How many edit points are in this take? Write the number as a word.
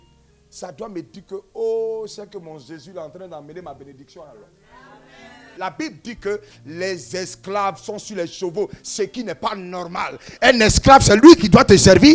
one